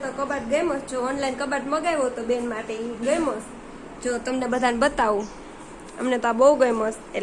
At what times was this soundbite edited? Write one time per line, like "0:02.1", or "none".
none

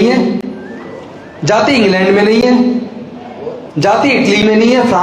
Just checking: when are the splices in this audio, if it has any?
none

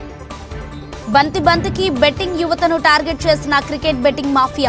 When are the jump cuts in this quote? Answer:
0:01.0

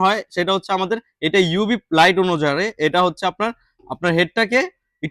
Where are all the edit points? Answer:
none

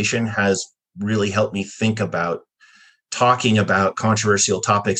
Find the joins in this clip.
none

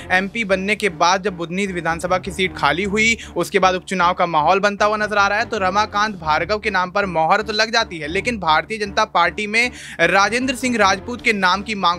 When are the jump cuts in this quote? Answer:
none

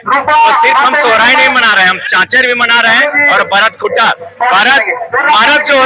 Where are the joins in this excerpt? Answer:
none

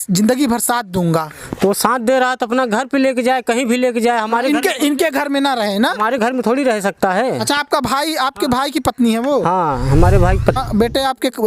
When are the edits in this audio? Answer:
0:10.6

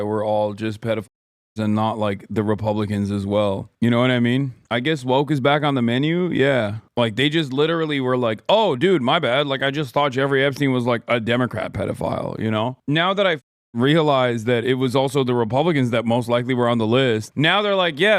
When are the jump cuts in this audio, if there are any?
0:17.3

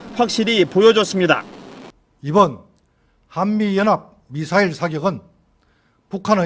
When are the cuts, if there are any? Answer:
0:05.1

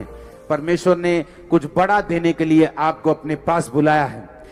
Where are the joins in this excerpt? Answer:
none

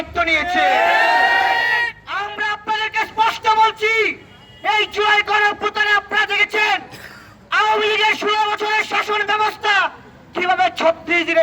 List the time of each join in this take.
none

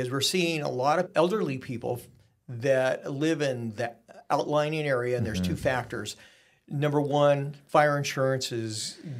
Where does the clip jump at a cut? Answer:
0:01.1

